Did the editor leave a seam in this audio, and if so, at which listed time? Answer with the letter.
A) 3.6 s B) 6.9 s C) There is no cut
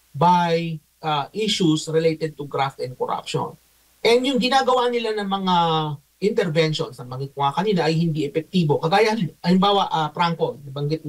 C